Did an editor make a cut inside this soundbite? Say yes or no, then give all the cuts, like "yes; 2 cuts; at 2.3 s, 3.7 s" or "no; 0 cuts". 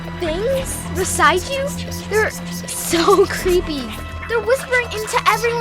yes; 1 cut; at 3.9 s